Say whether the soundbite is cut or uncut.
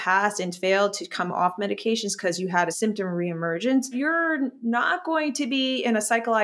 cut